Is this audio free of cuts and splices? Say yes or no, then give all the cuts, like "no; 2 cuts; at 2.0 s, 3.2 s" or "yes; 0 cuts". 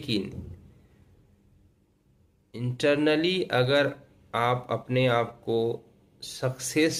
yes; 0 cuts